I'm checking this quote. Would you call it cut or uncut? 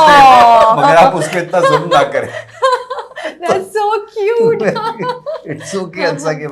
uncut